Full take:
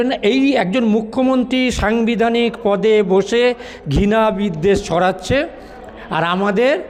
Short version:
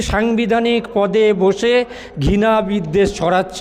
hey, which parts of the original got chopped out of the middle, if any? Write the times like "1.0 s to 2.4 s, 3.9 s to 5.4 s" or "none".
none